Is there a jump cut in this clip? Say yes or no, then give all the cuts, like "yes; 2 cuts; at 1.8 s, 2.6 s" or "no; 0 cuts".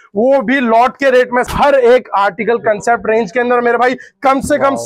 yes; 1 cut; at 1.5 s